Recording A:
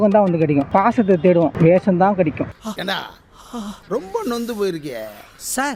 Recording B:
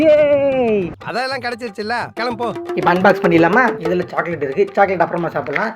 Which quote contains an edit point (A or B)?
B